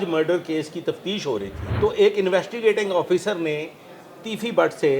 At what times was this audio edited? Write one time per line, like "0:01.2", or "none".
0:01.6